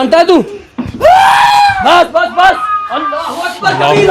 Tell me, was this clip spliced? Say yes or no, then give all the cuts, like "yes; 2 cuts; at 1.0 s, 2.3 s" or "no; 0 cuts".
no; 0 cuts